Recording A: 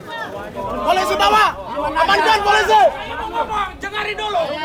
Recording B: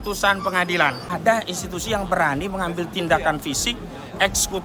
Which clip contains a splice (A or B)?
B